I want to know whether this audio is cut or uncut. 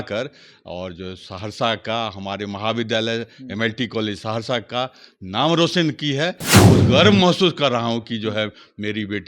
cut